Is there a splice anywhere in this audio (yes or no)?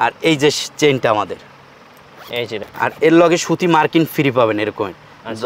yes